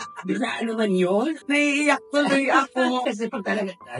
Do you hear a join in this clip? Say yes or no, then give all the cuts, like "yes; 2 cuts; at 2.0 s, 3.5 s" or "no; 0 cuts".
yes; 2 cuts; at 1.4 s, 3.0 s